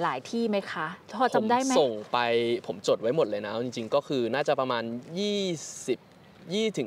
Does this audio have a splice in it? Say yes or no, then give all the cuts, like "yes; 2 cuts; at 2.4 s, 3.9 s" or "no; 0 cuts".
no; 0 cuts